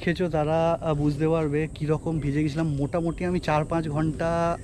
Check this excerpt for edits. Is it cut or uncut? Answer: uncut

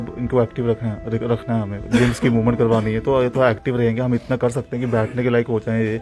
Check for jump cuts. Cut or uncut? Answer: uncut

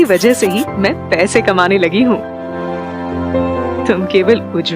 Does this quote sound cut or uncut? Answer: cut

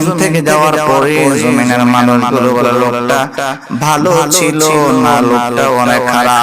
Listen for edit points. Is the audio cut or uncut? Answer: uncut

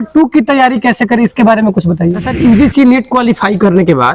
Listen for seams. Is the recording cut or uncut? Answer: cut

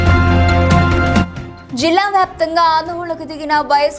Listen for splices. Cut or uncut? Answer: cut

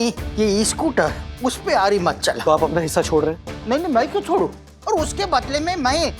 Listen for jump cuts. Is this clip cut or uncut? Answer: cut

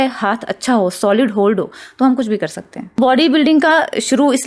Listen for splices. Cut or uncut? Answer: cut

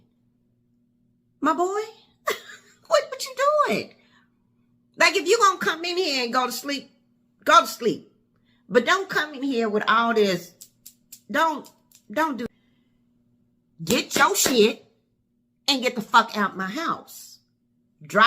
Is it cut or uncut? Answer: cut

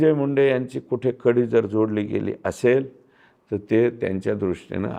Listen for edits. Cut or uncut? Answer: uncut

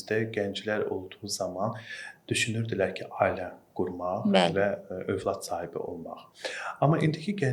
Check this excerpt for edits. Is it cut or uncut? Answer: uncut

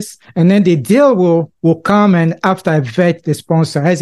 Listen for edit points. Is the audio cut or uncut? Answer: uncut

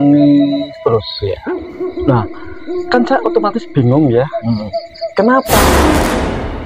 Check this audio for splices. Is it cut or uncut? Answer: cut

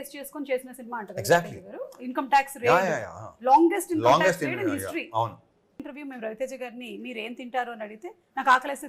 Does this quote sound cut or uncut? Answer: cut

